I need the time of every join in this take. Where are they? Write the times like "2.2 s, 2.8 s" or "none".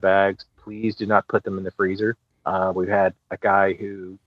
2.3 s